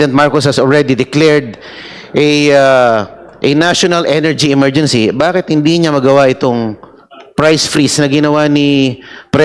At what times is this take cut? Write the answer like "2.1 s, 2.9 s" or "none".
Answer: none